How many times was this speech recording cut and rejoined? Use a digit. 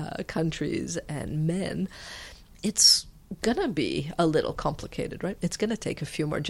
1